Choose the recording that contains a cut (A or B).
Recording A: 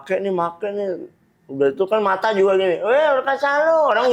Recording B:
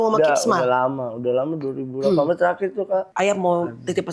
B